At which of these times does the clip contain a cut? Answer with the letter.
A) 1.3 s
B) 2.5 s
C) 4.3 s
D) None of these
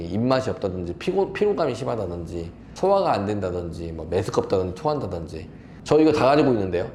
D